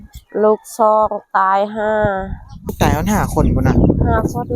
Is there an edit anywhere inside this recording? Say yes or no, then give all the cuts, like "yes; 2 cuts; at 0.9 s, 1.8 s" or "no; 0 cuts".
yes; 1 cut; at 2.7 s